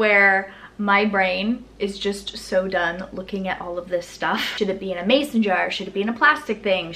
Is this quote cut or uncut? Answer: cut